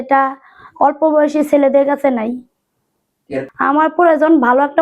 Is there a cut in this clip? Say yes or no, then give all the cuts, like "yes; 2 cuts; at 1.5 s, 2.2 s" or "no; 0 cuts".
yes; 1 cut; at 3.8 s